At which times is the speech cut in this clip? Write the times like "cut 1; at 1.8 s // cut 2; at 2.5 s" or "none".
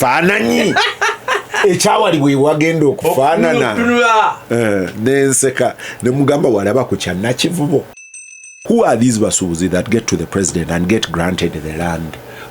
cut 1; at 8.5 s